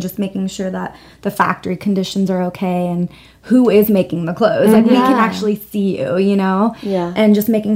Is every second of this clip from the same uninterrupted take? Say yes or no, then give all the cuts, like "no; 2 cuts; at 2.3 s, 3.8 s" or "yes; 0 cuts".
yes; 0 cuts